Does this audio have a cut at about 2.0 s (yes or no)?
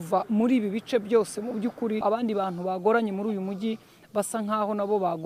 yes